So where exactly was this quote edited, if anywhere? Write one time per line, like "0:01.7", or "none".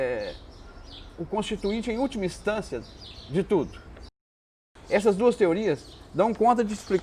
0:04.7